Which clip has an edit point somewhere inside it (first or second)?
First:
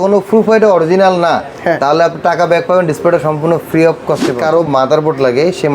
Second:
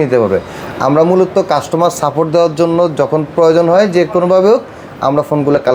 first